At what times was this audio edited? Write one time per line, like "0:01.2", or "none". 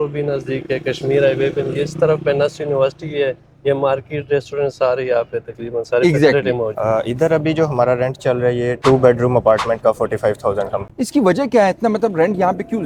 none